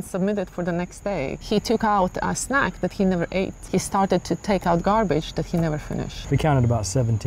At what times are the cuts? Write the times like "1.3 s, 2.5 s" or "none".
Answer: 1.4 s, 3.6 s, 6.1 s